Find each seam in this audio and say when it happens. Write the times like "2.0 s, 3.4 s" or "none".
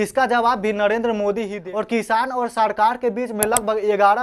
1.5 s